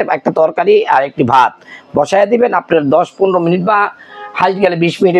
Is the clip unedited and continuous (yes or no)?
yes